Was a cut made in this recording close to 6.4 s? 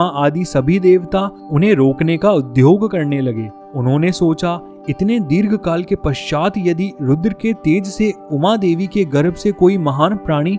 no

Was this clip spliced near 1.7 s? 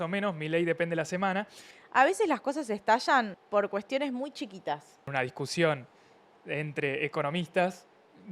yes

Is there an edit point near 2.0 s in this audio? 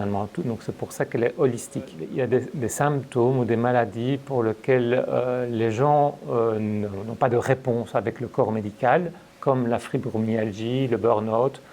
yes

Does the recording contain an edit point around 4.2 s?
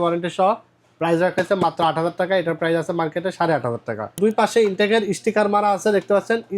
yes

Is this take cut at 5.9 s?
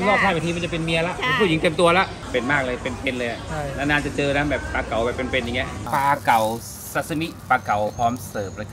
yes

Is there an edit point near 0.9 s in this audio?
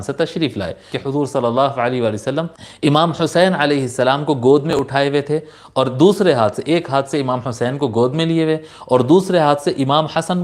yes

